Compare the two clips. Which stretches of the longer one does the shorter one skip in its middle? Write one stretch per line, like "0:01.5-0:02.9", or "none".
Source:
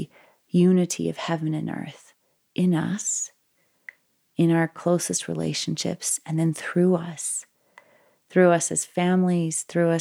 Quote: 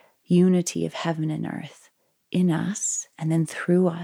0:03.3-0:06.1